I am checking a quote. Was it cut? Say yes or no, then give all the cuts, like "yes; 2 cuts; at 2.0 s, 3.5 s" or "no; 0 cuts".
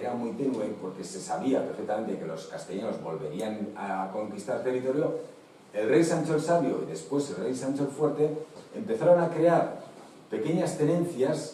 no; 0 cuts